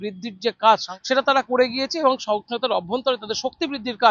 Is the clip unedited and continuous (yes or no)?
no